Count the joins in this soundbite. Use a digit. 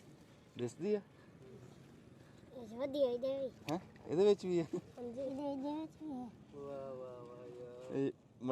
0